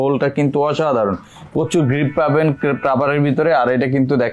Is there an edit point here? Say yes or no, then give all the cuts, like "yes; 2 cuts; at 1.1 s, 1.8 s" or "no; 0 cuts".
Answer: no; 0 cuts